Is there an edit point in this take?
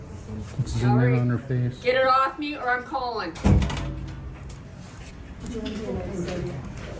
no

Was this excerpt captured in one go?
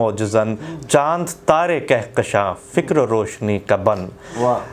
yes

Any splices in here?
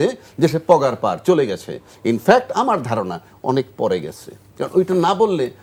no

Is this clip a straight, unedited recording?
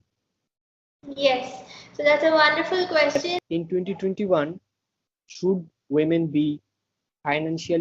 no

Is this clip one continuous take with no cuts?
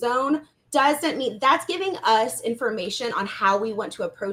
yes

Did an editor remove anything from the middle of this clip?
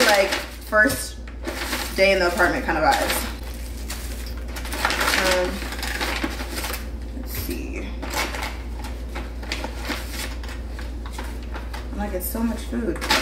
no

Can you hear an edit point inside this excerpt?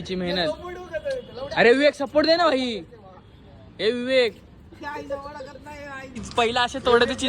yes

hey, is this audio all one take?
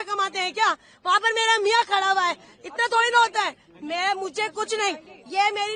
yes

